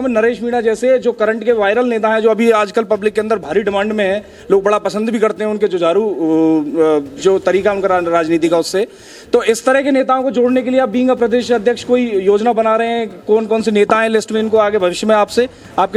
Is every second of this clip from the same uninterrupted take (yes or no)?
yes